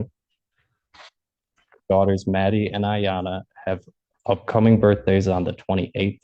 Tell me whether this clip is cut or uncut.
uncut